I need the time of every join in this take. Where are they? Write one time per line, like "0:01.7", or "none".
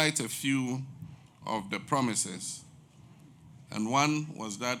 none